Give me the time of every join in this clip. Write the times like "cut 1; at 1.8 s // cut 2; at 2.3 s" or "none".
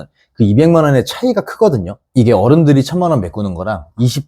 cut 1; at 2.0 s